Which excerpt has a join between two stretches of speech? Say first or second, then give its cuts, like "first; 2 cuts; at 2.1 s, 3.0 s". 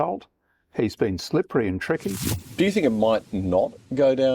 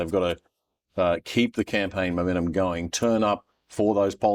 first; 1 cut; at 2.4 s